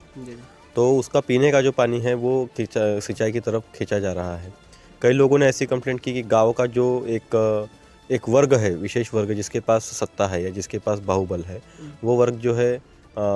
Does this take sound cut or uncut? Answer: uncut